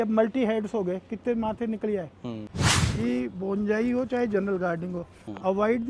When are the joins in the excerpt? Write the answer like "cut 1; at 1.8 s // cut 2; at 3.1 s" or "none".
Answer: cut 1; at 2.5 s